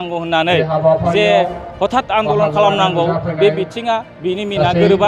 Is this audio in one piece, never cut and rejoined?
yes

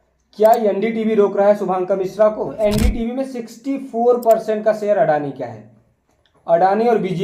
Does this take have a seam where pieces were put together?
yes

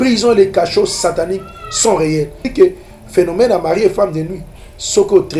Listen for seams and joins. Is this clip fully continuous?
no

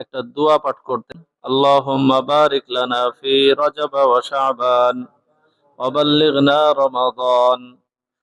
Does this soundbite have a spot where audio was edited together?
yes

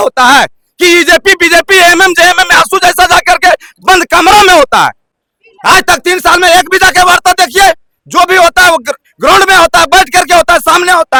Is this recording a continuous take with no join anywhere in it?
yes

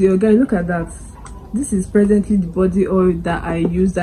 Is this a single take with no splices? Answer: yes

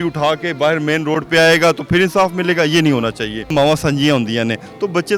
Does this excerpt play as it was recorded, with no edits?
no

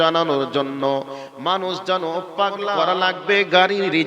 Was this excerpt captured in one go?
no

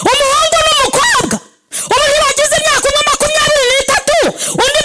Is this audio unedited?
yes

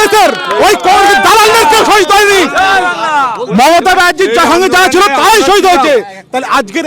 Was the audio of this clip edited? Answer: no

